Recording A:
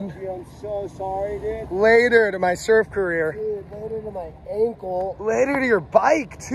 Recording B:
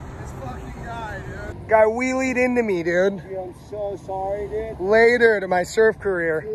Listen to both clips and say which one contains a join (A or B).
B